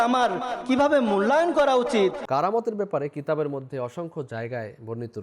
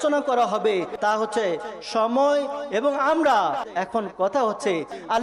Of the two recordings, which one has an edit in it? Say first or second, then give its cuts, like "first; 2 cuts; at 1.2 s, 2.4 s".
first; 1 cut; at 2.2 s